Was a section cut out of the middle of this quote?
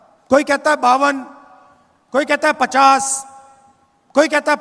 no; 0 cuts

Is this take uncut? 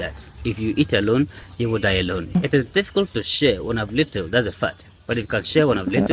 no; 1 cut; at 2.4 s

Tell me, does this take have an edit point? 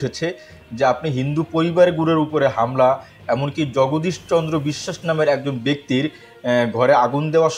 no; 0 cuts

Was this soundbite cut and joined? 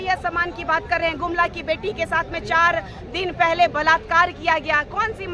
no; 0 cuts

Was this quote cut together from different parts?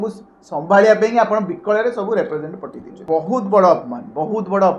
yes; 1 cut; at 3.0 s

